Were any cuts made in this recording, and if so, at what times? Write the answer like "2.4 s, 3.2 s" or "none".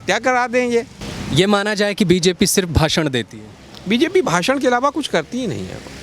none